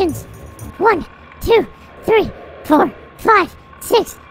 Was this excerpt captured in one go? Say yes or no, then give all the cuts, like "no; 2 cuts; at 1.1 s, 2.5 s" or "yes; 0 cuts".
yes; 0 cuts